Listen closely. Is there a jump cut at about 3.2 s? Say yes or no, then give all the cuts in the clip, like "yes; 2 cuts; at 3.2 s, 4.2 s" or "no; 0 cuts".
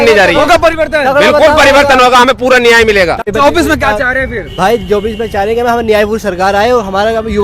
yes; 1 cut; at 3.2 s